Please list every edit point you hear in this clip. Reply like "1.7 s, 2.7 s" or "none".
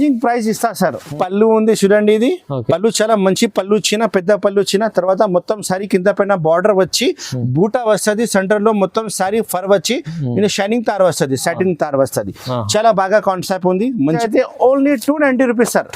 1.1 s, 14.2 s